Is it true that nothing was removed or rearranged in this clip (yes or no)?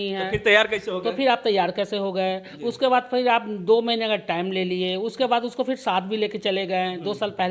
yes